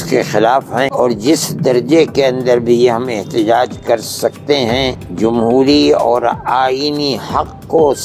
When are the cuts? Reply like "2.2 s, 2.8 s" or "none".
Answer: 0.9 s, 5.0 s